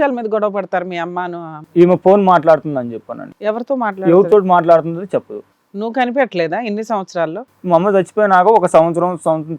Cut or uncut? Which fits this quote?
cut